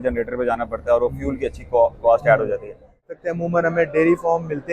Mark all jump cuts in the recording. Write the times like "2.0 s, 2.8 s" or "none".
3.1 s